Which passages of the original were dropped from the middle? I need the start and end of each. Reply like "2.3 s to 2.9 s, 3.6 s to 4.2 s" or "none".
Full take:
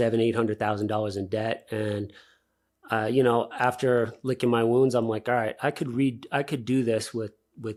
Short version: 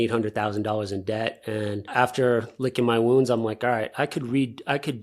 2.1 s to 3.5 s